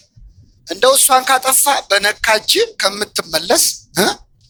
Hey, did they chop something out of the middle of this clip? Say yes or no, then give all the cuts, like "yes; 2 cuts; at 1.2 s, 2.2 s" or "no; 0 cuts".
no; 0 cuts